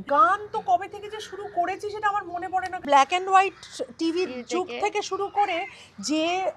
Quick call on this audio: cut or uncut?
cut